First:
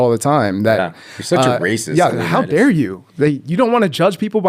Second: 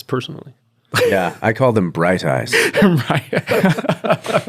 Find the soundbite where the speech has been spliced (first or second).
second